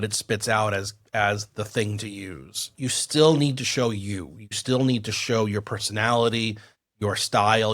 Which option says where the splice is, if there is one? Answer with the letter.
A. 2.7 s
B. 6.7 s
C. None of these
A